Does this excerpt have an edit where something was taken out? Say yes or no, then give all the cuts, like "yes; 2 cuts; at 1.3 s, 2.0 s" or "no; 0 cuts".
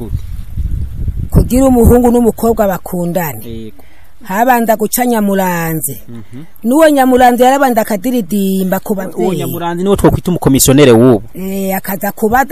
no; 0 cuts